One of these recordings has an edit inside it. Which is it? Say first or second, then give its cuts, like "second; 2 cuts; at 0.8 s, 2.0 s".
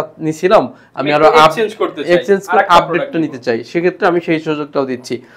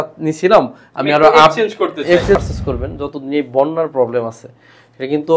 second; 1 cut; at 2.4 s